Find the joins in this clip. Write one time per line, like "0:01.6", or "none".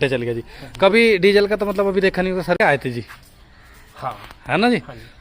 0:02.6